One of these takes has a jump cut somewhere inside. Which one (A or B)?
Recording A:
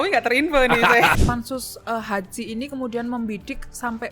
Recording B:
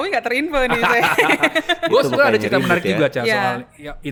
A